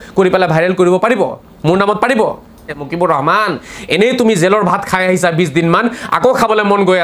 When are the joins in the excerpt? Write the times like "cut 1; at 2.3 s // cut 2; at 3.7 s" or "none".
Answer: cut 1; at 2.8 s